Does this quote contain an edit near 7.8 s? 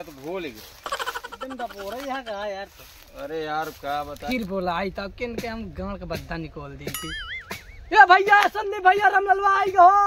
no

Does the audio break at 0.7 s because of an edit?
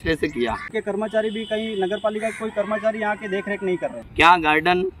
yes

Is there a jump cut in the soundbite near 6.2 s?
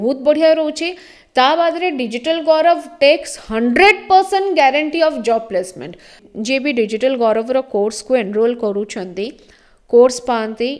yes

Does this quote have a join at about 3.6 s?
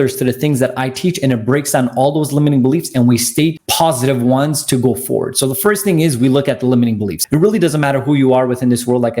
yes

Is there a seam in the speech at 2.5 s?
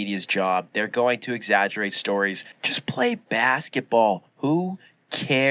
yes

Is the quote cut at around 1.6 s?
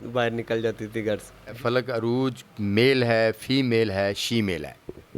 yes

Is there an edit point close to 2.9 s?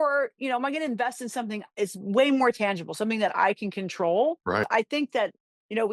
no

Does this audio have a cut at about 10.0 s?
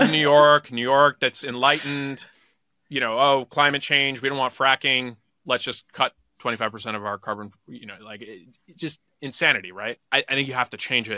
yes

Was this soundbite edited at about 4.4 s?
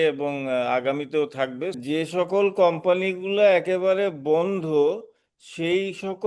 no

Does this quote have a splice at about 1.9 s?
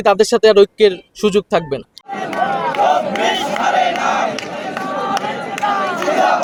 no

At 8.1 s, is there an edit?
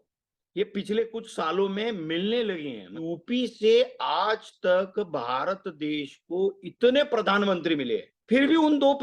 yes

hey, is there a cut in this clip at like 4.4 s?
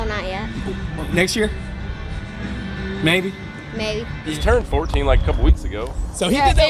yes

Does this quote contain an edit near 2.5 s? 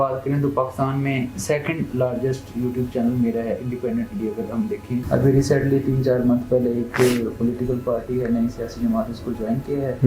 no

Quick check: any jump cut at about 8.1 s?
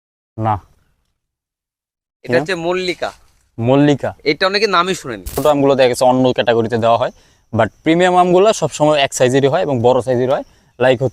no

